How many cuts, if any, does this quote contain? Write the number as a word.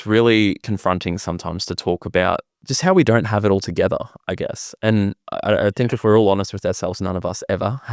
one